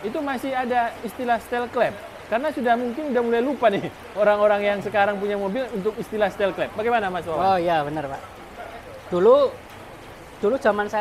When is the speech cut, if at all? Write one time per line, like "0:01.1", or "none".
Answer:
none